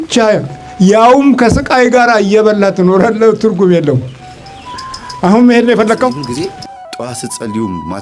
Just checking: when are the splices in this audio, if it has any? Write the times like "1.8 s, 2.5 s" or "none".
6.2 s